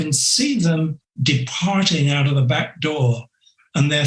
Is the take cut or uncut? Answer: cut